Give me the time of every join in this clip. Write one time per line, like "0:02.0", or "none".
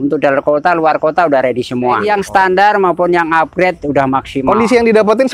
0:02.0
0:04.4